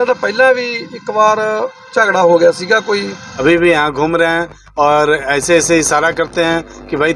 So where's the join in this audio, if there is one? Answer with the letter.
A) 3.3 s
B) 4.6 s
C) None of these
A